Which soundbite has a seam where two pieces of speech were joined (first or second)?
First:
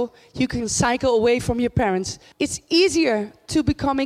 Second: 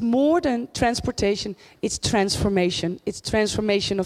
first